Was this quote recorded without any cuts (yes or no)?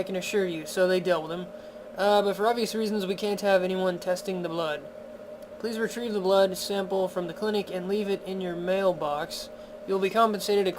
no